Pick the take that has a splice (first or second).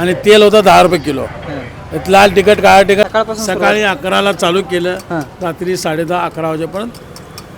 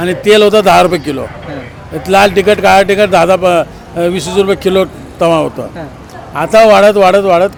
first